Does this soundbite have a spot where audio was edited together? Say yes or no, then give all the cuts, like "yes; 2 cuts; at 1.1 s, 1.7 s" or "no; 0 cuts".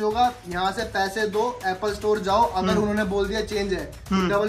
no; 0 cuts